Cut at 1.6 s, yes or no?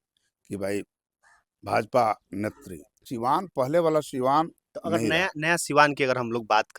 no